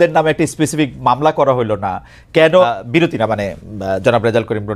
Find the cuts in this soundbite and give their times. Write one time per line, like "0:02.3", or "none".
0:02.5